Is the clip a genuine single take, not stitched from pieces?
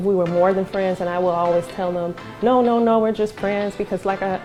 yes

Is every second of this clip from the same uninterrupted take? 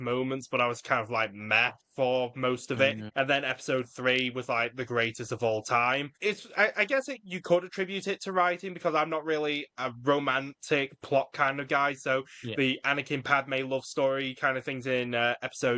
no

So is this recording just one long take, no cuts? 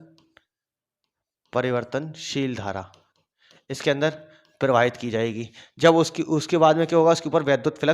yes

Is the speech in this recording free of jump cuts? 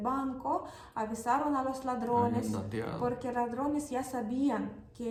yes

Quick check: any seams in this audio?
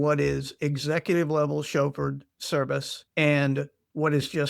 yes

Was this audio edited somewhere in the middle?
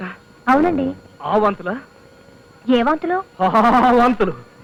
no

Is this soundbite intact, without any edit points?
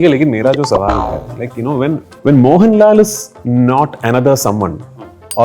no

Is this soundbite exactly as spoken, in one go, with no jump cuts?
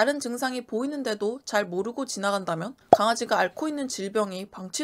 yes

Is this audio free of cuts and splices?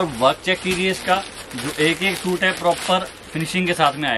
yes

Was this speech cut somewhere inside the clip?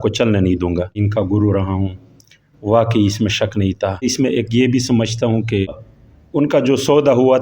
yes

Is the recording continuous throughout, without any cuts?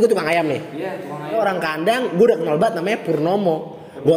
no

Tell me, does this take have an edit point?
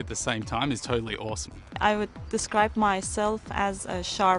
yes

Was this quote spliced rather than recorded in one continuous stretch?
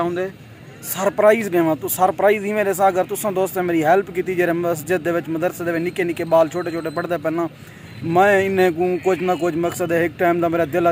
no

